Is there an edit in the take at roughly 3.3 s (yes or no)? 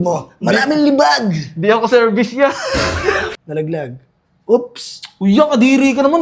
yes